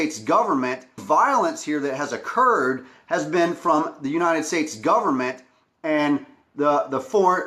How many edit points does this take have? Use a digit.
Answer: 2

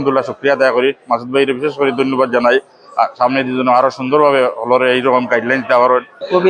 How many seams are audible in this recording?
0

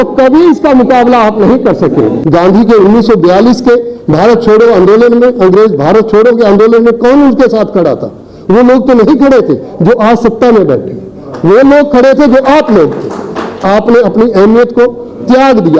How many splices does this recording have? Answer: 2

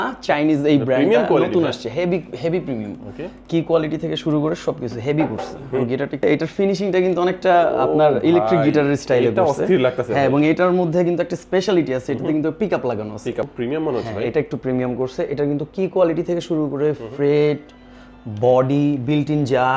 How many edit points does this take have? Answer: 2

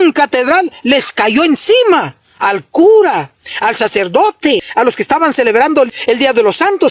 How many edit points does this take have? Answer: 2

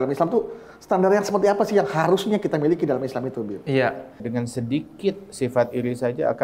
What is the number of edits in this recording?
1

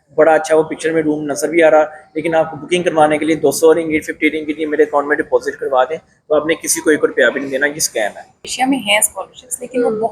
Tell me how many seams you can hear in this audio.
1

